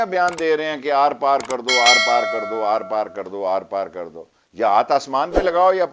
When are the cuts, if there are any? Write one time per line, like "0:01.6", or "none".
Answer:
none